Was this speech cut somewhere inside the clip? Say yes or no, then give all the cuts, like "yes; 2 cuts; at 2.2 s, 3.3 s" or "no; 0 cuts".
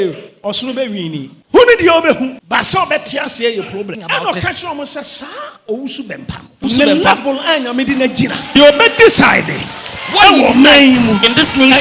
yes; 5 cuts; at 1.3 s, 2.4 s, 4.0 s, 6.6 s, 8.6 s